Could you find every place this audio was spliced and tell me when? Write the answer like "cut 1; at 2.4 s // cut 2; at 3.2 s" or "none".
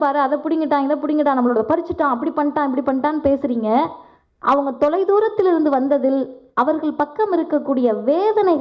none